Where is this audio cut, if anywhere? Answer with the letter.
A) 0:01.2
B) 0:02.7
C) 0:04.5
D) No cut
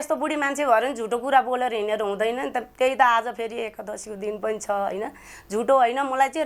D